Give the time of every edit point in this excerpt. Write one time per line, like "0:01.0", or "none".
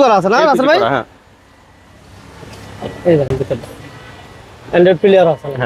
none